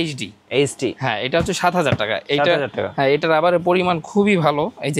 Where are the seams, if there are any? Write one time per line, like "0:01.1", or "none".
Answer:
none